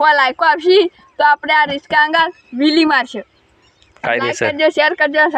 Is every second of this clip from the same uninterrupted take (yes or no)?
yes